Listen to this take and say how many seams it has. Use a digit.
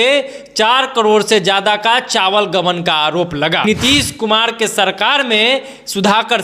1